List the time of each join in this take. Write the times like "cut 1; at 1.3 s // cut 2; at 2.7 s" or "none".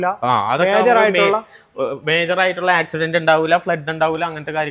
none